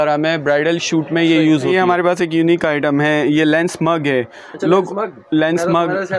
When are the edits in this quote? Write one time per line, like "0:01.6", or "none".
0:01.7

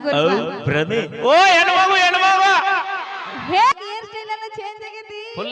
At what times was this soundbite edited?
0:03.7

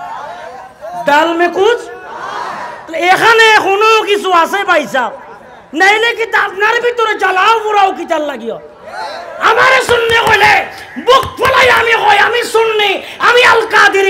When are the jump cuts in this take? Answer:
none

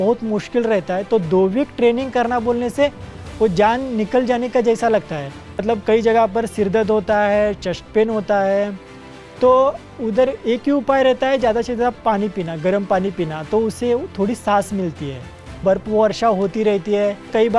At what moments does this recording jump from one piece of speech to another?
0:05.6
0:15.5

